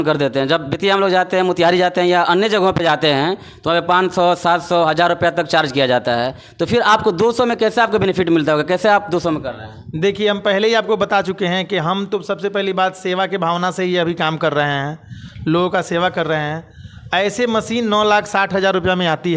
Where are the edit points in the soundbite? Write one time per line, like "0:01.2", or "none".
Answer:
none